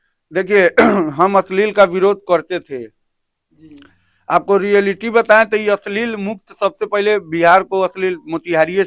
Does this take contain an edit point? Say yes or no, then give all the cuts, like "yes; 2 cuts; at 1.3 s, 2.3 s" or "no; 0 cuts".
no; 0 cuts